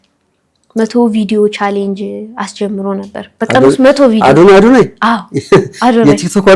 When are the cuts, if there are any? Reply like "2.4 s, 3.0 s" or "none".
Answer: none